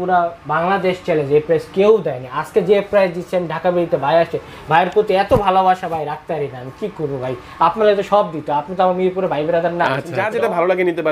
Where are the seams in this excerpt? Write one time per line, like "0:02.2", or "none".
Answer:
0:10.2